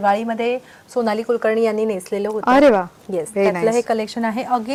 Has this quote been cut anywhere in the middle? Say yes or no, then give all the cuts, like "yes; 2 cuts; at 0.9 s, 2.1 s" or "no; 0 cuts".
no; 0 cuts